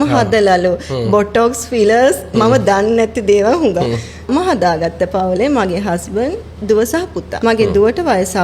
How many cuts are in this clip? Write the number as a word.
two